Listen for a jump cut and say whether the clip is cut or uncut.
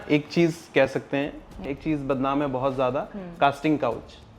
cut